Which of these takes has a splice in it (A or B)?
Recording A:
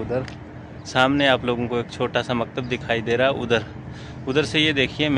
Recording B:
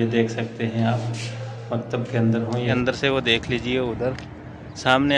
B